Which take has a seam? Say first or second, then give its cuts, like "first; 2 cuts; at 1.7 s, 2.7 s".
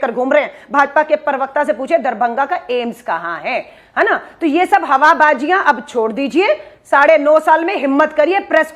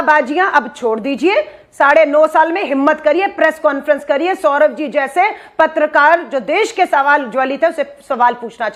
first; 1 cut; at 3.8 s